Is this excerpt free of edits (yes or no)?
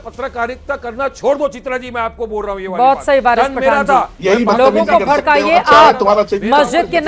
yes